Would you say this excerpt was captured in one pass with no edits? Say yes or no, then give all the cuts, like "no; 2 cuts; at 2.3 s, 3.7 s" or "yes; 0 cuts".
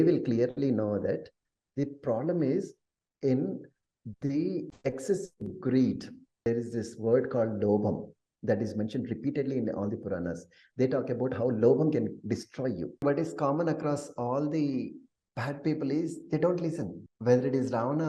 no; 1 cut; at 13.0 s